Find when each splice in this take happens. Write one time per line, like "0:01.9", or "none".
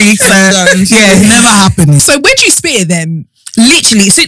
0:02.0